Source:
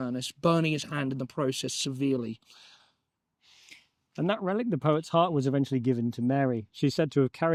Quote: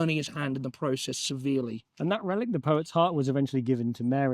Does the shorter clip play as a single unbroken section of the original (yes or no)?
no